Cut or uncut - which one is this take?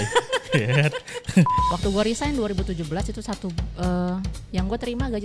cut